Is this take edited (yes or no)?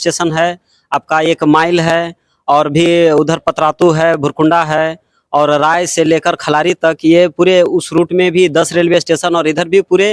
no